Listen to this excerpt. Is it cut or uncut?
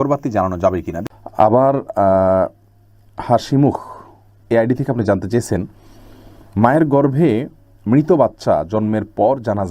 cut